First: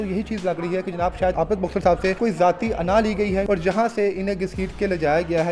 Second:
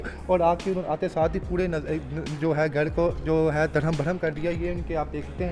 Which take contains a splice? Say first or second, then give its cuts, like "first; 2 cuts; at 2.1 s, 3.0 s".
first; 3 cuts; at 1.3 s, 2.2 s, 3.5 s